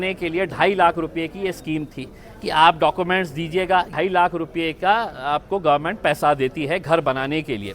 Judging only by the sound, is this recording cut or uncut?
cut